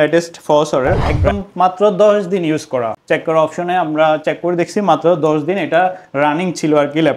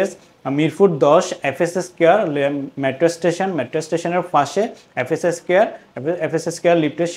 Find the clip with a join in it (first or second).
first